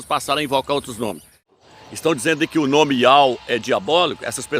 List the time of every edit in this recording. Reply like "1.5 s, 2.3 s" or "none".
1.5 s